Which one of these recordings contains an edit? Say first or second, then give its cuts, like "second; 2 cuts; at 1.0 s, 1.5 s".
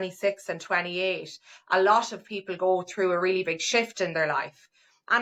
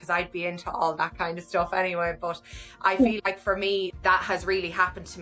second; 1 cut; at 3.9 s